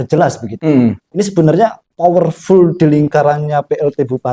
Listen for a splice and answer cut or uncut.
cut